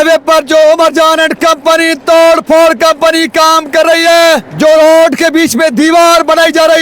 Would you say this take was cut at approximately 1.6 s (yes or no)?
no